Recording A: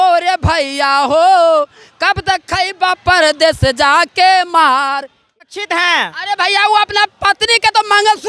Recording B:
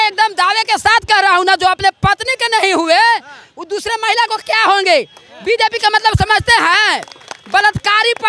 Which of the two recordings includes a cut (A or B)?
A